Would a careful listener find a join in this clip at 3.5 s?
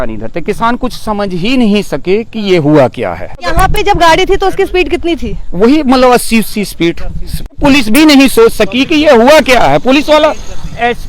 yes; 2 cuts; at 3.5 s, 7.6 s

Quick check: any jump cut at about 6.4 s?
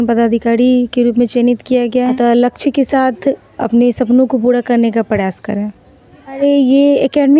yes; 2 cuts; at 2.1 s, 6.4 s

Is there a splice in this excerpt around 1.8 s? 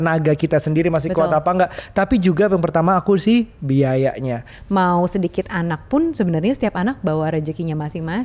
no; 1 cut; at 4.5 s

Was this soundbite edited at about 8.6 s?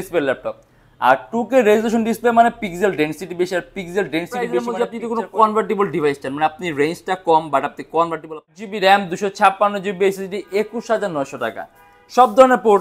yes; 2 cuts; at 4.7 s, 8.6 s

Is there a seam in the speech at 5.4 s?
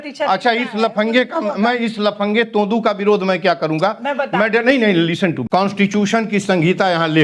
yes; 1 cut; at 5.4 s

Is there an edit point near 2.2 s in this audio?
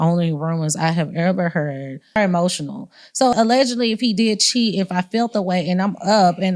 yes; 1 cut; at 2.2 s

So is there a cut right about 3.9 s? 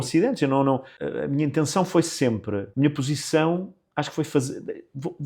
no; 2 cuts; at 1.0 s, 2.7 s

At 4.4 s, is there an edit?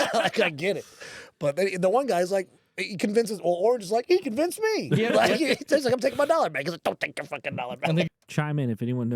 no; 1 cut; at 8.1 s

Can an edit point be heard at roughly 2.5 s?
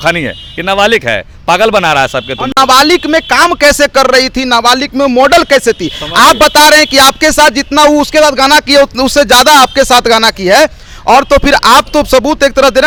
no; 0 cuts

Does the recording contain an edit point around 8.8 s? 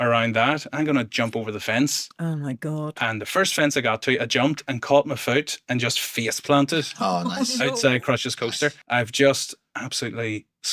yes; 1 cut; at 8.8 s

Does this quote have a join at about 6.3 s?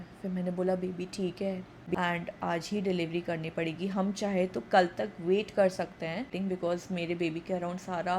yes; 2 cuts; at 1.9 s, 6.3 s

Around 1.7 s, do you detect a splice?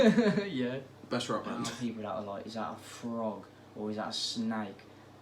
yes; 1 cut; at 1.7 s

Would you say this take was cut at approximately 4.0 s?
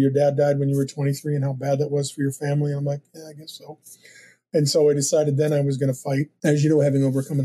no; 1 cut; at 6.3 s

